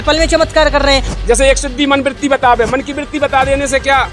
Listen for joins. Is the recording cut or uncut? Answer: cut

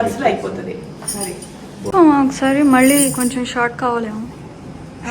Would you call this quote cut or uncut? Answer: cut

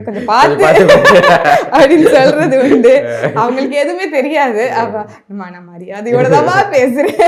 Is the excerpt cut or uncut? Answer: uncut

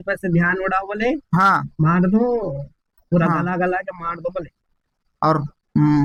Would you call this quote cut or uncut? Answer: uncut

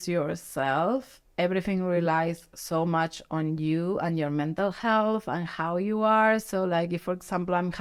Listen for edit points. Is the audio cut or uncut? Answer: uncut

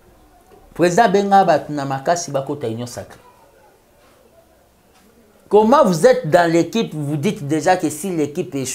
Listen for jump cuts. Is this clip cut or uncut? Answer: uncut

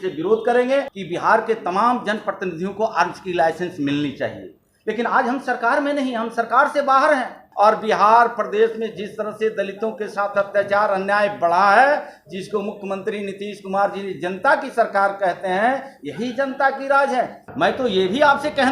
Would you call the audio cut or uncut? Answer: cut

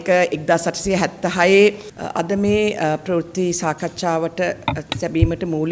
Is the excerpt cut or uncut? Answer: cut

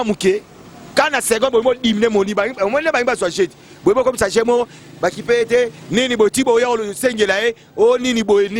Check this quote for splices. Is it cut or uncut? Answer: uncut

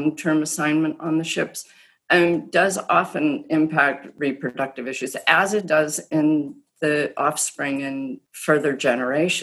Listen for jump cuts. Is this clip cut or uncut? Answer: cut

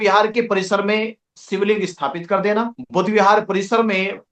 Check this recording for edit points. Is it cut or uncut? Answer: cut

